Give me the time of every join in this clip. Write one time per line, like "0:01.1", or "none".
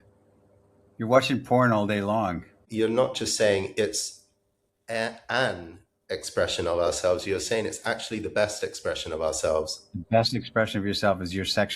0:02.6